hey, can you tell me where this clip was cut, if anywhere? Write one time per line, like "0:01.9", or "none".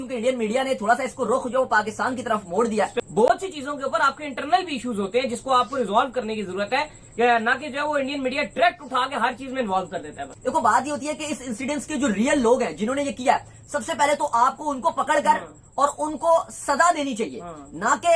0:02.9
0:10.3